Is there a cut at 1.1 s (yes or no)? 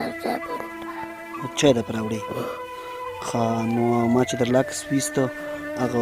no